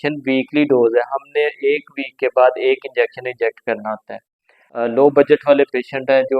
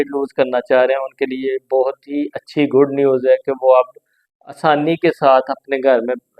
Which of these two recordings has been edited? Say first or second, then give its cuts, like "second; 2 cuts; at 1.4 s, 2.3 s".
first; 1 cut; at 4.7 s